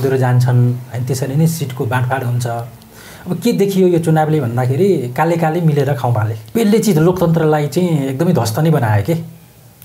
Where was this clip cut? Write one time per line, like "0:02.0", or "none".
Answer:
0:06.4